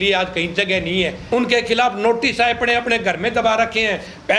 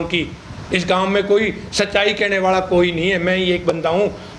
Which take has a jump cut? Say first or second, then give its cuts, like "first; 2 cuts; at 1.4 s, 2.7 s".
first; 1 cut; at 1.2 s